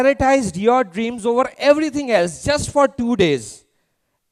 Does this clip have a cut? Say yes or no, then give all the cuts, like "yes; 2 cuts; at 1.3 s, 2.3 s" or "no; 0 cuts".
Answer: no; 0 cuts